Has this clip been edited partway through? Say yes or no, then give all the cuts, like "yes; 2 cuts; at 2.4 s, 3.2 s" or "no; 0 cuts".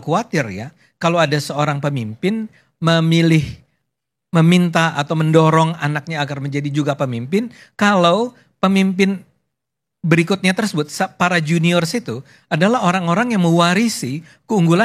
no; 0 cuts